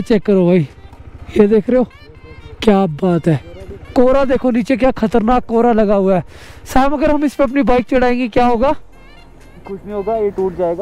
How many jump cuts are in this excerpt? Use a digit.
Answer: 0